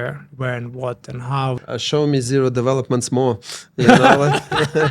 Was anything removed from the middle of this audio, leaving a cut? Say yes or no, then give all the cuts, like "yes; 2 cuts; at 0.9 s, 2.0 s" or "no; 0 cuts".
yes; 1 cut; at 1.6 s